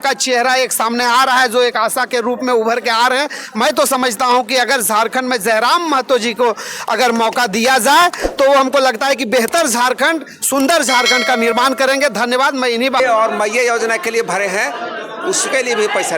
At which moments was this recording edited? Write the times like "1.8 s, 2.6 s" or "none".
13.0 s

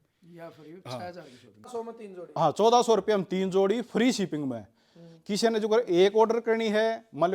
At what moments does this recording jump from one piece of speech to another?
1.6 s

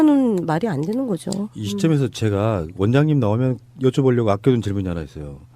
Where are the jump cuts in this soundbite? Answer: 3.6 s

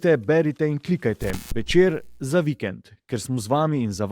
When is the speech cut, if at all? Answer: none

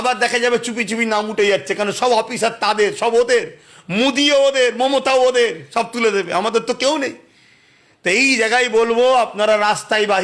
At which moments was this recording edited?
none

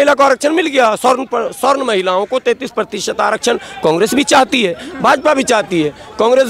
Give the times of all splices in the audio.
none

